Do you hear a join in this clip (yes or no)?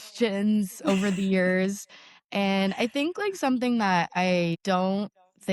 no